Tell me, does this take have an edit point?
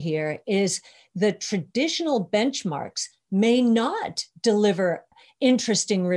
yes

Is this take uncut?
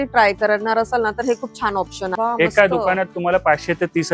no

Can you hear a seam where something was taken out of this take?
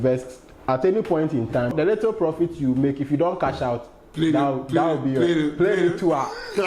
yes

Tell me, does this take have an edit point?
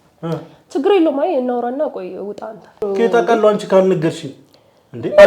yes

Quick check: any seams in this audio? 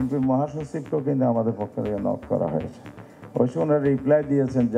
no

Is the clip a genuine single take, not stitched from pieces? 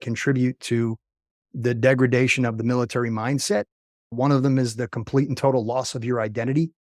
yes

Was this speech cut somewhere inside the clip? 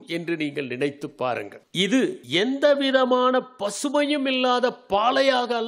yes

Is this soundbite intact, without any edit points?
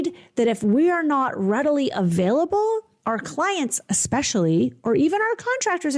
yes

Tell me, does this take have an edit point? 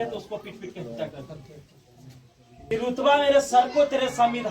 yes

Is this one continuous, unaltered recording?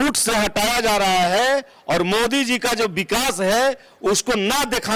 yes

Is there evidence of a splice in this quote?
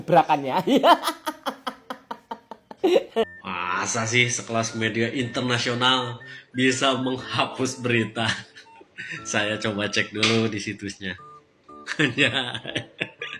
yes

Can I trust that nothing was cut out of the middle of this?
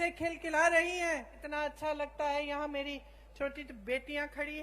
no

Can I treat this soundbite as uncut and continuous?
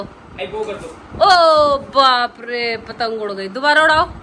yes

